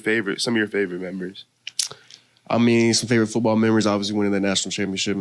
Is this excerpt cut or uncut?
uncut